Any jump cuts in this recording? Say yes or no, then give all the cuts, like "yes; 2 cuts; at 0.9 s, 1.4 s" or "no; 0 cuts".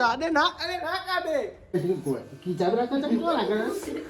yes; 1 cut; at 1.6 s